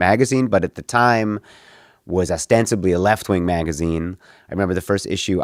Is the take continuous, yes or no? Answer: yes